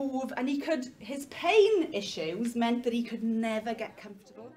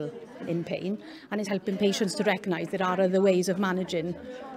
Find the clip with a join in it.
second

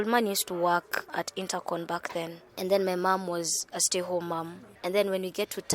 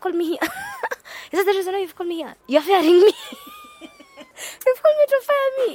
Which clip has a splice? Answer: first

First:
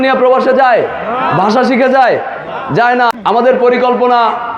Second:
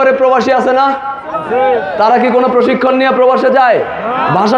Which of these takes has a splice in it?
first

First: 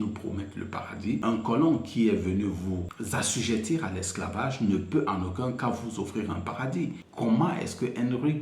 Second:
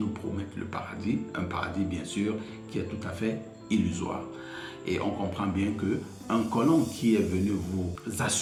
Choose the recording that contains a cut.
first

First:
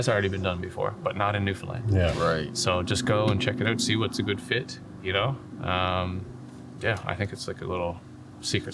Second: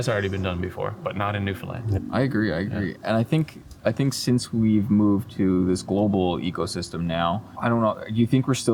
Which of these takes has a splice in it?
second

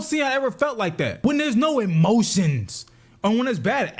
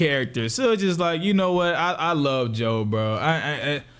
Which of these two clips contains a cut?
first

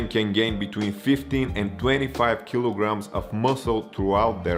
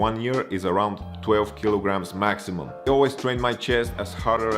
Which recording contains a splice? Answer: second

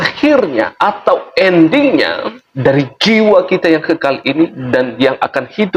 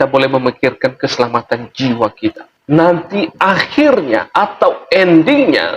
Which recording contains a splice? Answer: second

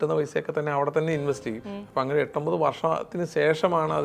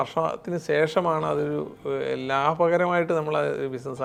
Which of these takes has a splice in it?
first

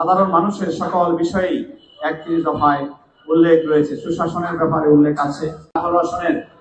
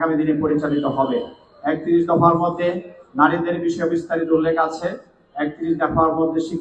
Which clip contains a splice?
first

